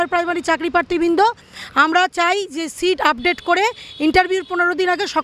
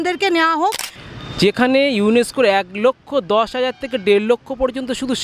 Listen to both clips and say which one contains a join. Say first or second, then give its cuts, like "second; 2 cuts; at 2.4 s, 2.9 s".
second; 1 cut; at 0.9 s